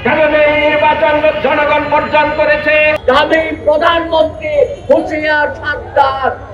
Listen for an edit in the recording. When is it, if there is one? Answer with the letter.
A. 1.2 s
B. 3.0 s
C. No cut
B